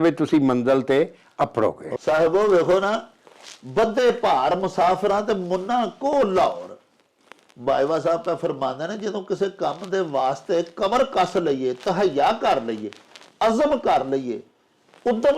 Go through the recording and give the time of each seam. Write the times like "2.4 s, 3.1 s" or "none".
none